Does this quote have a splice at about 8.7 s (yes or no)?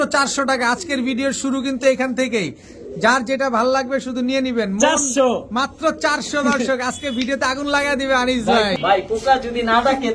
yes